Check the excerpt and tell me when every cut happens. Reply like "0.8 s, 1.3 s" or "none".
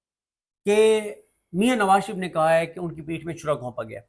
none